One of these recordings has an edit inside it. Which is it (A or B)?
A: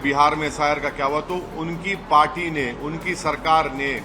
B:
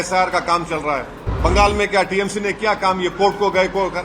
B